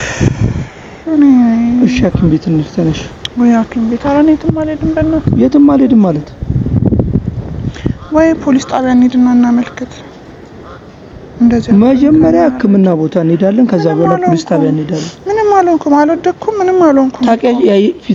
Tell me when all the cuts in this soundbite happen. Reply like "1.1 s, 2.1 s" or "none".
none